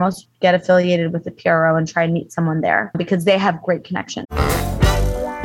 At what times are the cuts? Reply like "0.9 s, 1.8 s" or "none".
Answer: 3.0 s, 4.3 s